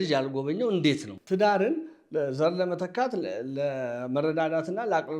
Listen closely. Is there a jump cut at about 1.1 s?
yes; 1 cut; at 1.1 s

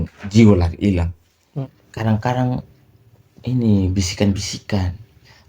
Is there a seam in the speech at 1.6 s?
yes; 1 cut; at 1.6 s

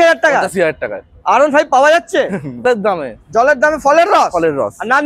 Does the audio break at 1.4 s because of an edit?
no; 1 cut; at 2.6 s

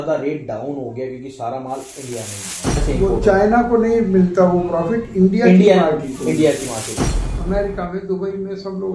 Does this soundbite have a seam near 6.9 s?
yes; 2 cuts; at 2.8 s, 6.9 s

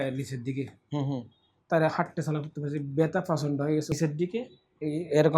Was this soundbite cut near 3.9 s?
yes; 1 cut; at 3.9 s

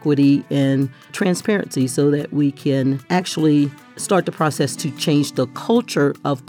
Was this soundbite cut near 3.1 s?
yes; 2 cuts; at 3.1 s, 3.9 s

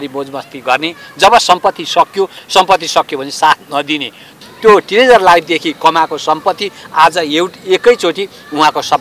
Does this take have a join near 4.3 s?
yes; 1 cut; at 4.3 s

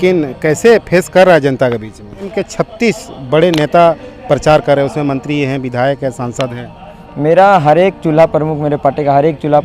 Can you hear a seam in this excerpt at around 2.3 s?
yes; 1 cut; at 2.3 s

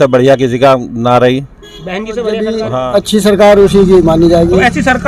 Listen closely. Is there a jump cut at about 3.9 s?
no; 1 cut; at 2.7 s

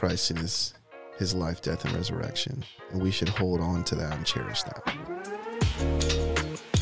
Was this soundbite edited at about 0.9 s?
no; 2 cuts; at 2.7 s, 4.5 s

